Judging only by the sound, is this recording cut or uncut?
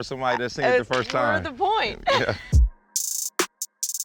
cut